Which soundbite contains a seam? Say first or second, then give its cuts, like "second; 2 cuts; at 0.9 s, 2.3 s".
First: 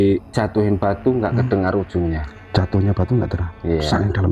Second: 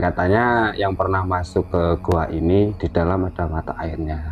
first; 1 cut; at 2.3 s